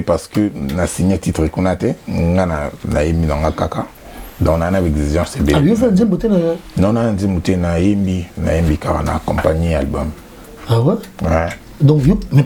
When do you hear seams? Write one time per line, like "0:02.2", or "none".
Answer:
none